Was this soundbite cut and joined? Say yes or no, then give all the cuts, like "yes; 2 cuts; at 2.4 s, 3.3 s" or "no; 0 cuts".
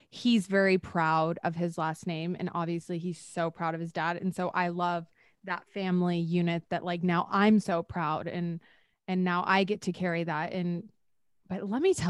no; 0 cuts